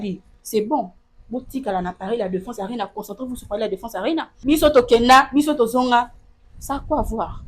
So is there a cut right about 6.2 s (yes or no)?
no